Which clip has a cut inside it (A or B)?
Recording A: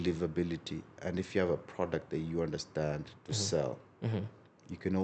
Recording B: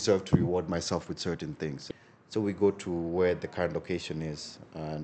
B